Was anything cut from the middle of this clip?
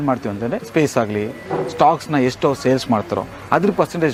no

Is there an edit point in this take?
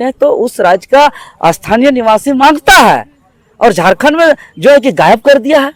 no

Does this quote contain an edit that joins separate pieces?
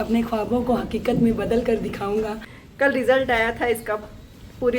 yes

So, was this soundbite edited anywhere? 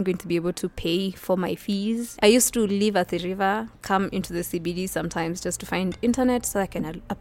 yes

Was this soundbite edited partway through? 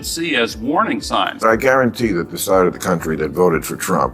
yes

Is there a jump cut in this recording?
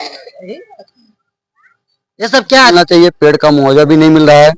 yes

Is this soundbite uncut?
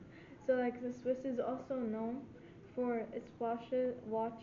yes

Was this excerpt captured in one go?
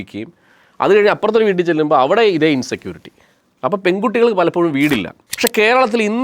no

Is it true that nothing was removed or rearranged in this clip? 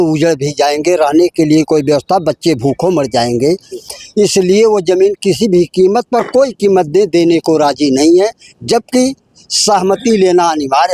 yes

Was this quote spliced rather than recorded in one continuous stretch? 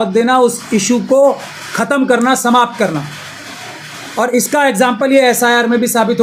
no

